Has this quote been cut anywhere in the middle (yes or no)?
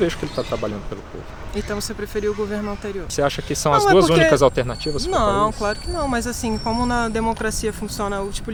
no